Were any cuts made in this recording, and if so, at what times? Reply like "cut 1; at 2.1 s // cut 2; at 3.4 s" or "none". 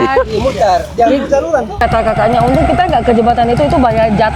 cut 1; at 1.8 s